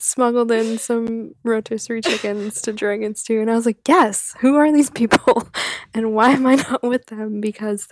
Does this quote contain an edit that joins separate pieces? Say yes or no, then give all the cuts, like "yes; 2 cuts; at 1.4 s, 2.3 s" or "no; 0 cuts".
no; 0 cuts